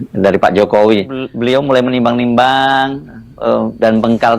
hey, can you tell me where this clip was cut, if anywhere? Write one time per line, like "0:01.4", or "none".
0:01.3